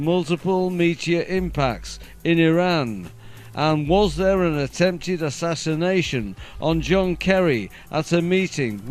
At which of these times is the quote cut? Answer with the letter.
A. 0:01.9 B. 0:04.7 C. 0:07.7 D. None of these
A